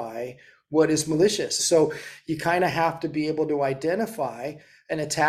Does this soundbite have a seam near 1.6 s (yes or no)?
yes